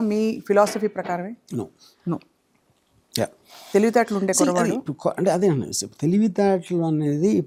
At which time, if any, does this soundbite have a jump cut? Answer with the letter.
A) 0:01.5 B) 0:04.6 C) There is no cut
C